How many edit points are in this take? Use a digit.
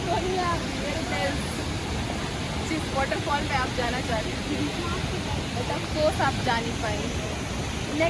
0